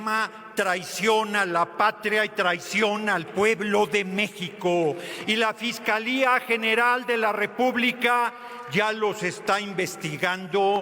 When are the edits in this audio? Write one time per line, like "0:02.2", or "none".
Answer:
none